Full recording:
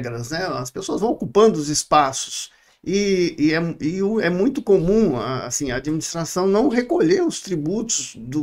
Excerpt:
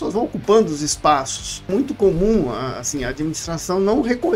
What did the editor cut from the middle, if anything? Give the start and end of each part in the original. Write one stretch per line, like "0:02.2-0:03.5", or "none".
0:02.5-0:04.3